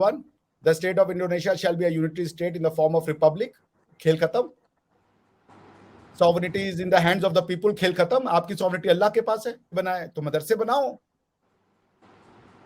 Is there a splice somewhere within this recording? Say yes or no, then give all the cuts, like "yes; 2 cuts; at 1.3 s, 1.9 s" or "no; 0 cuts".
yes; 1 cut; at 9.7 s